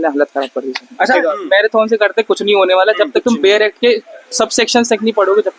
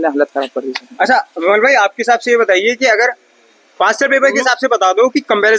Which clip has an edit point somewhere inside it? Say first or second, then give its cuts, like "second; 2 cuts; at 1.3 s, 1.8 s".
first; 1 cut; at 1.1 s